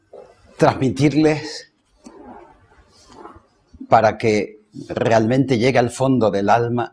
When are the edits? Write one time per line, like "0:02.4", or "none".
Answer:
0:02.4